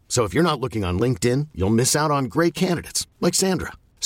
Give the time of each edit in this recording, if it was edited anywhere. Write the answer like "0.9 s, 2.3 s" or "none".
none